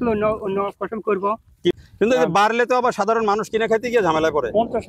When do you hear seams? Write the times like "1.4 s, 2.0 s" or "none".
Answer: 1.7 s